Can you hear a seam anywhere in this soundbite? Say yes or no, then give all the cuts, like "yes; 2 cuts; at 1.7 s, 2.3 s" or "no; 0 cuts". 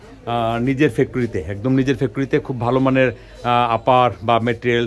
no; 0 cuts